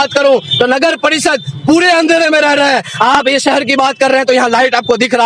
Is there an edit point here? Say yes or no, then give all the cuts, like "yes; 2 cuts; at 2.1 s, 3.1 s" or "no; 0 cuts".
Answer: no; 0 cuts